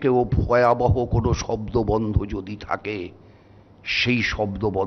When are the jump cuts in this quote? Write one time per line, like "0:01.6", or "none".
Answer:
none